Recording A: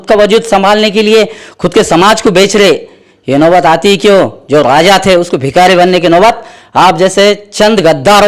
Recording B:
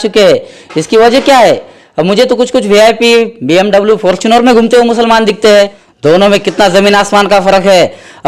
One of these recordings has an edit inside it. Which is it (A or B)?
B